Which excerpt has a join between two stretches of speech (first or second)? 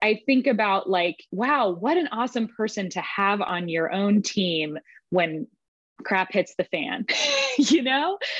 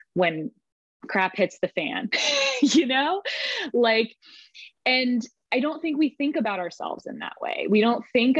first